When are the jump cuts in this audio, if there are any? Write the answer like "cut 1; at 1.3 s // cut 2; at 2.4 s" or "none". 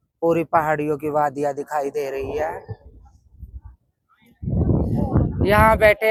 none